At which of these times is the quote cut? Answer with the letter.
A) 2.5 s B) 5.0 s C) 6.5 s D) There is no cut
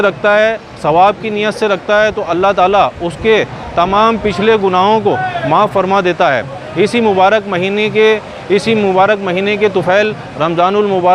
D